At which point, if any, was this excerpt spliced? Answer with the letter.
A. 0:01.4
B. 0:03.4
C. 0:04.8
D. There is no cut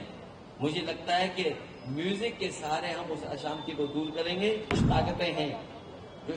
C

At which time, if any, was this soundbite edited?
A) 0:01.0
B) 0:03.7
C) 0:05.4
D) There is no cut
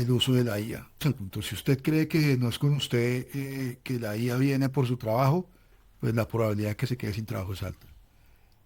A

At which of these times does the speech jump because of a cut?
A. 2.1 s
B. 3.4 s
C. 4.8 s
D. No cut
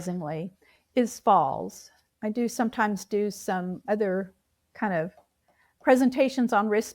A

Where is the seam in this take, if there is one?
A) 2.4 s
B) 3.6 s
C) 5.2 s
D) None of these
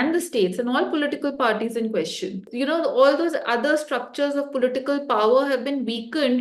A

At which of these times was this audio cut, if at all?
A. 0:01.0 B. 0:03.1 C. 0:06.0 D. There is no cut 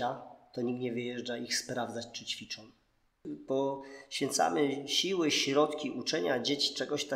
B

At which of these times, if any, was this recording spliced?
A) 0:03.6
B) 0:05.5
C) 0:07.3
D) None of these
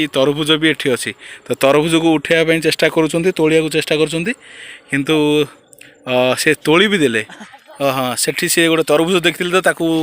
C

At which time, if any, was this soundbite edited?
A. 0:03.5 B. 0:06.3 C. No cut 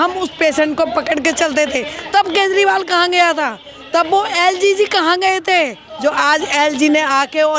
C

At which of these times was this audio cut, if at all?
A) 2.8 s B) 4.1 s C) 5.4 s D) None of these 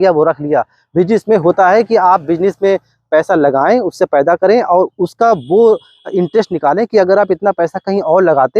D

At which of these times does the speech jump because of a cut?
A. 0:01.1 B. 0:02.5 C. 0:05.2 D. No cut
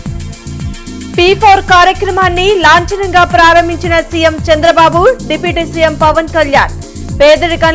A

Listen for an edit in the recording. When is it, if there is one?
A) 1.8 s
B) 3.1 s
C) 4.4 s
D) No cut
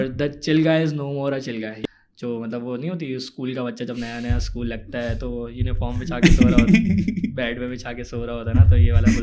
A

